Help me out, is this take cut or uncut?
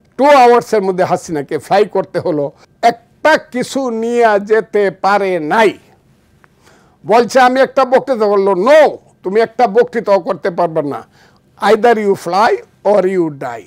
cut